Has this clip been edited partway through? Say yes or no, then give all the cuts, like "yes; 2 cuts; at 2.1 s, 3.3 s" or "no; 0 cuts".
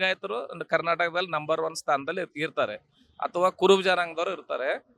no; 0 cuts